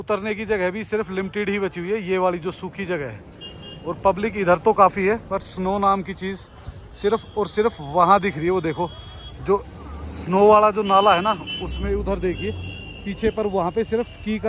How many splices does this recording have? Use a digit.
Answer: 0